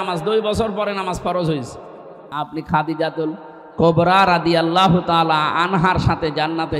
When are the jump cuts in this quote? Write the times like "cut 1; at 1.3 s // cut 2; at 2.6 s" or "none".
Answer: cut 1; at 2.3 s